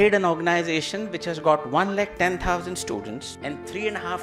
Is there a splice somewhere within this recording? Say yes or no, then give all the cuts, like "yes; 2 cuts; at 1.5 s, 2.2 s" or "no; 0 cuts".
yes; 1 cut; at 3.2 s